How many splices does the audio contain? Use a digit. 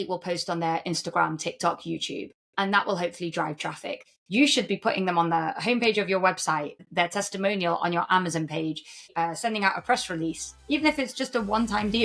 3